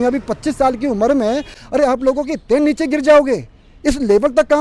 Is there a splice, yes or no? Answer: yes